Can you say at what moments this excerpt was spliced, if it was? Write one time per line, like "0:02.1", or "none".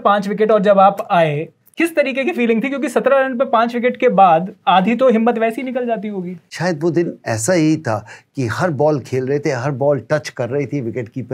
0:01.7
0:06.4